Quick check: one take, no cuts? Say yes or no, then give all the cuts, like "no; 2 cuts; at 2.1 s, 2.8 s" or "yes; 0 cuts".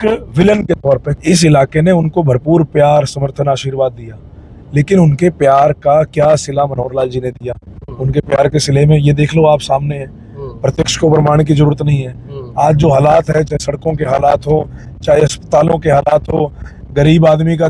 no; 1 cut; at 1.1 s